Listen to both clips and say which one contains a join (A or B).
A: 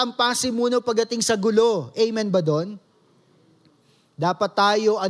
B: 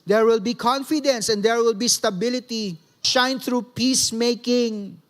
B